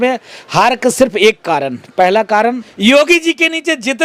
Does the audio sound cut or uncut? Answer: cut